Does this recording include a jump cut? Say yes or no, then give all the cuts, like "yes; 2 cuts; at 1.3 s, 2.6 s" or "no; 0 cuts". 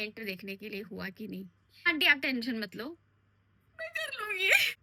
no; 0 cuts